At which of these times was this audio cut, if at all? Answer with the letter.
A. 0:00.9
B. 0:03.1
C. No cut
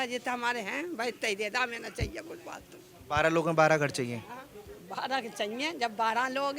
C